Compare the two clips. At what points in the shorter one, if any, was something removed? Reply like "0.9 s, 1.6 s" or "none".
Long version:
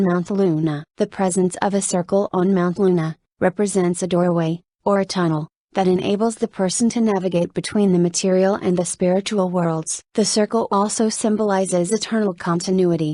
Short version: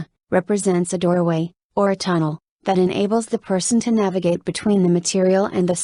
none